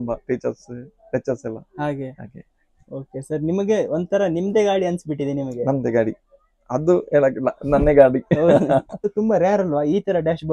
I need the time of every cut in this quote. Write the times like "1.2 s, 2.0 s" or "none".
9.1 s